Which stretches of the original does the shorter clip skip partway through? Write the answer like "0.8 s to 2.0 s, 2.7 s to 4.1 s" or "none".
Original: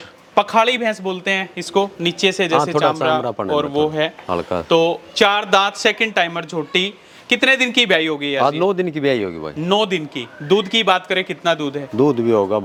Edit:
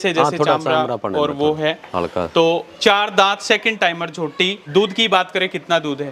6.9 s to 10.4 s